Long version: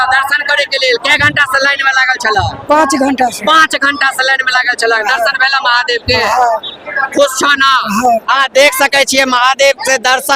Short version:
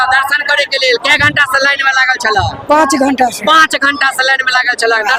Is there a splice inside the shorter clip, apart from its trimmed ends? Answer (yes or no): no